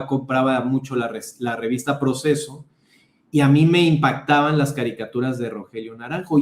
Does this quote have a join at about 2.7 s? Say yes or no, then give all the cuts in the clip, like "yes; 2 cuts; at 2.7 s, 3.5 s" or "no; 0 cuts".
no; 0 cuts